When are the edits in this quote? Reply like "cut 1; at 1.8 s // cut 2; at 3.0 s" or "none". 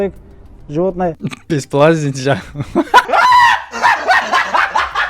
cut 1; at 1.1 s